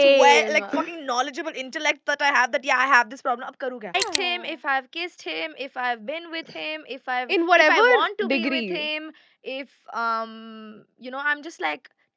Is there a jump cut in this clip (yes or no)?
yes